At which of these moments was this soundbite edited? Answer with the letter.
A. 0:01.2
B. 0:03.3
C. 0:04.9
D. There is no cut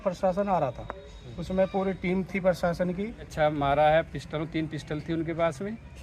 B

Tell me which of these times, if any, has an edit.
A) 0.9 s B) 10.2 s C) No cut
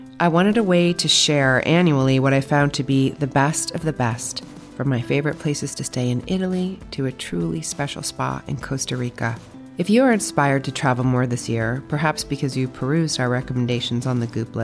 C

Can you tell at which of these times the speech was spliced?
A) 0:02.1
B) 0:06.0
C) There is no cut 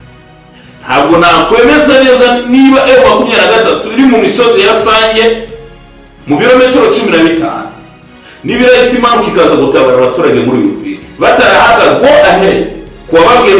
C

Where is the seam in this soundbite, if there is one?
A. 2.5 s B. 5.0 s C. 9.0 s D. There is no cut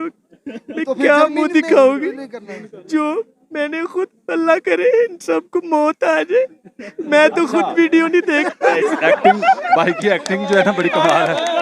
D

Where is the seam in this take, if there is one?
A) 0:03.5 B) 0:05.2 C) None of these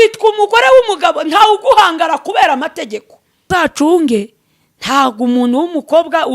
A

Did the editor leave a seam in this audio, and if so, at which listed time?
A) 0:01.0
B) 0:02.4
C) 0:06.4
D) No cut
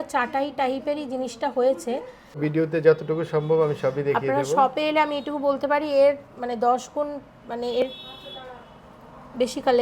B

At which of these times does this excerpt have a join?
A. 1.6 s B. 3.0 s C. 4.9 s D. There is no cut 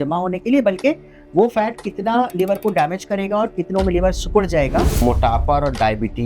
C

